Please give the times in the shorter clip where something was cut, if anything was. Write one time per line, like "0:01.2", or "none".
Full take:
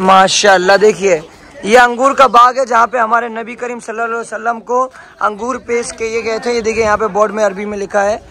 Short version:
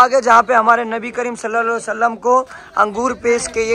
none